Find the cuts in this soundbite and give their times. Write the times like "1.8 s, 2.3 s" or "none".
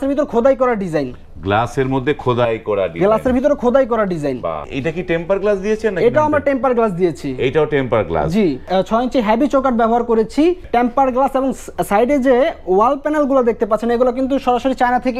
4.7 s, 8.6 s, 10.6 s